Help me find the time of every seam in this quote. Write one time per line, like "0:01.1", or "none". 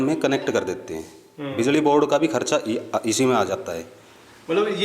none